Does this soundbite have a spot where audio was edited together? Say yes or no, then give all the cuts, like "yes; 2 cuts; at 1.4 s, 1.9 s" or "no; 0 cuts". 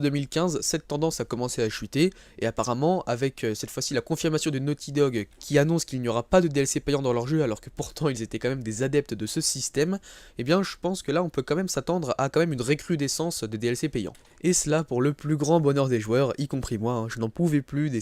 no; 0 cuts